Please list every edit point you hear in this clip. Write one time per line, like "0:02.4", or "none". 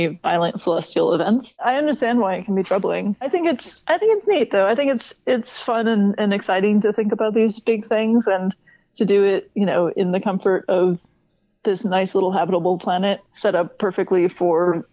0:01.5
0:03.3
0:13.3